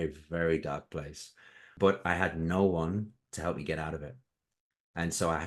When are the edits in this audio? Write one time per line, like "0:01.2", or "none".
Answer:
0:01.6